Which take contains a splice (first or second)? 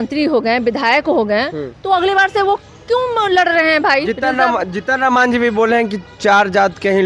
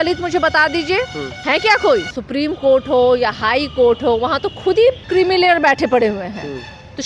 second